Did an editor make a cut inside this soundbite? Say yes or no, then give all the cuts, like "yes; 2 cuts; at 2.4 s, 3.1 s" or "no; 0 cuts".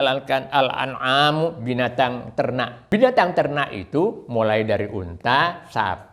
yes; 1 cut; at 2.8 s